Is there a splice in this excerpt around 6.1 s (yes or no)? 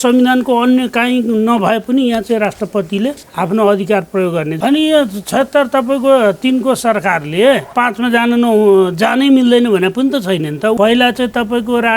no